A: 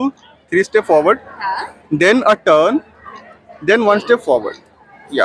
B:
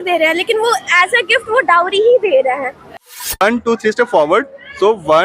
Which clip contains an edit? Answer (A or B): B